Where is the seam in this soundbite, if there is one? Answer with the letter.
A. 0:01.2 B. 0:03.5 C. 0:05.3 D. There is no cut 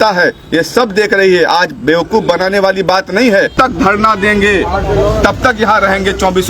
B